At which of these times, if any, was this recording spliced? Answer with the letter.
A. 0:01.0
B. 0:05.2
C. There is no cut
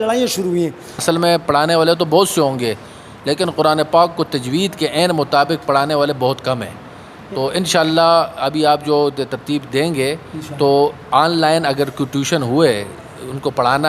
A